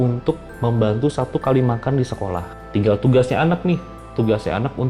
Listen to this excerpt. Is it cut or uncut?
cut